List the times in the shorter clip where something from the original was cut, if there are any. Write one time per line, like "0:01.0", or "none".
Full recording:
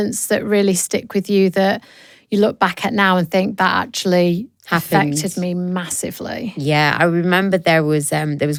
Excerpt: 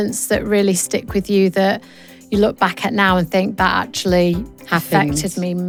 none